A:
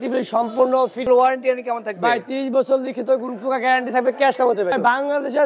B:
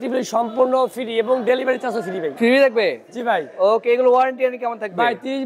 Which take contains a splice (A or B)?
A